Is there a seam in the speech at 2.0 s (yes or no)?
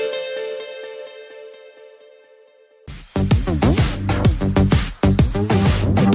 no